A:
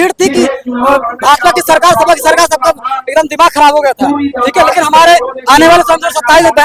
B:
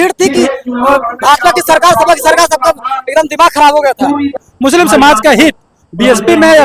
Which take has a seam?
B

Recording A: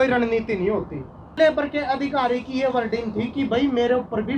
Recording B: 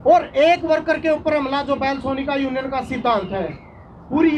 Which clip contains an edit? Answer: A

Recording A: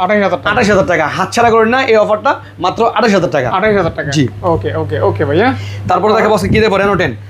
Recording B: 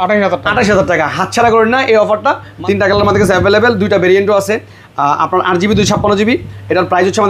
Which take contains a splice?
B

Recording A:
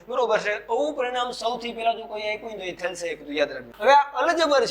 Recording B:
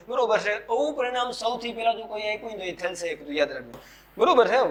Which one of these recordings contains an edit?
A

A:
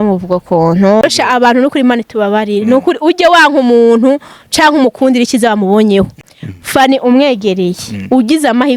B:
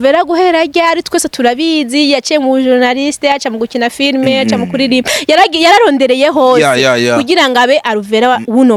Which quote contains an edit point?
A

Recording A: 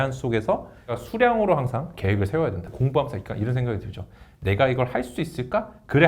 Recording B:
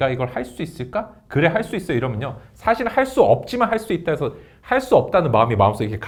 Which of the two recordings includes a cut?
A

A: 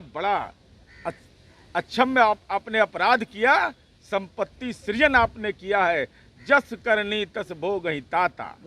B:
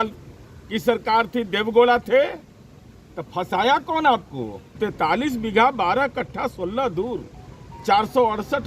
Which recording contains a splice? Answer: B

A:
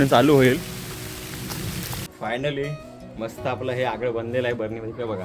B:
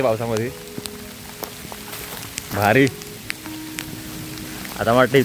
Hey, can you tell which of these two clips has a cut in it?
A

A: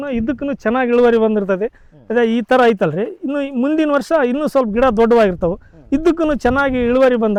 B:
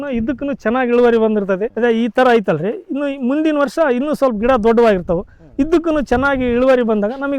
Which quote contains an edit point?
B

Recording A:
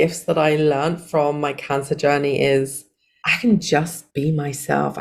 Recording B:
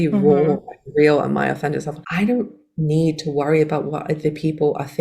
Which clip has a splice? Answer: B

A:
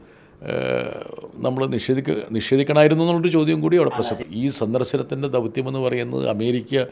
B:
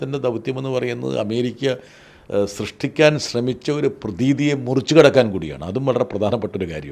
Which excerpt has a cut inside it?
A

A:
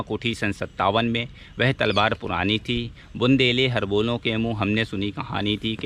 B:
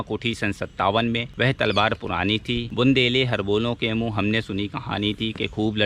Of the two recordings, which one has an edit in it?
B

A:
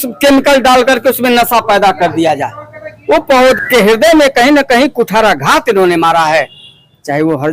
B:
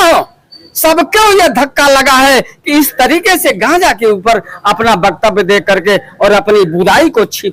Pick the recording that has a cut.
A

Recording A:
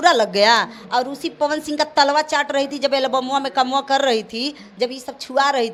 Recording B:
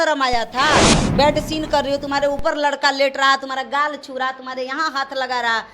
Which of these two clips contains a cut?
B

